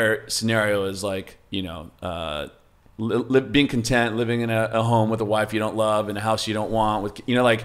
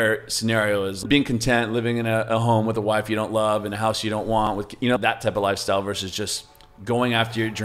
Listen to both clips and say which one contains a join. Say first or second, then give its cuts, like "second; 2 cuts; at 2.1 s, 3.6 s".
second; 2 cuts; at 1.0 s, 4.5 s